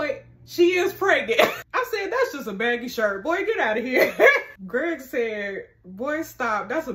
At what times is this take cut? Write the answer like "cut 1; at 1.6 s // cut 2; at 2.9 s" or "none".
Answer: cut 1; at 1.6 s // cut 2; at 4.5 s